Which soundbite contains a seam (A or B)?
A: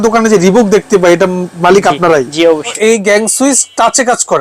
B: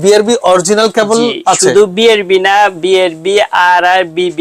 A